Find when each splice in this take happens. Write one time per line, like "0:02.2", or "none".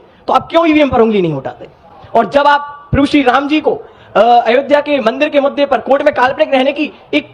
none